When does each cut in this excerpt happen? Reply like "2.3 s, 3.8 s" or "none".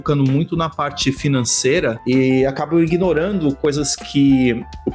none